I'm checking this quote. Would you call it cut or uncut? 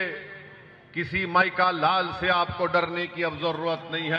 uncut